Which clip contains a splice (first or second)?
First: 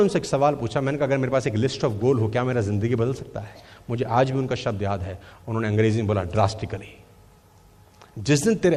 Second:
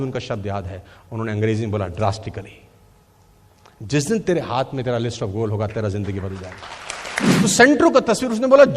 second